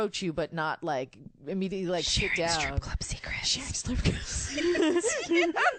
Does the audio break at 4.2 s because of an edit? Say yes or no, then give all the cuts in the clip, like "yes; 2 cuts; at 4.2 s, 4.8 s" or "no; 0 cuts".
no; 0 cuts